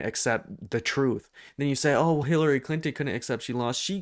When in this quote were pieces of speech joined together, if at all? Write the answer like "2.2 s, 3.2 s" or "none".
1.4 s